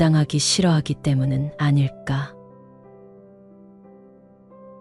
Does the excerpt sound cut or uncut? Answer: cut